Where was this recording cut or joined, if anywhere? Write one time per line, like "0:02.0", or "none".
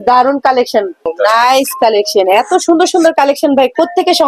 0:01.1